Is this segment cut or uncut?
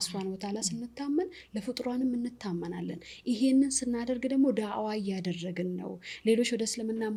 uncut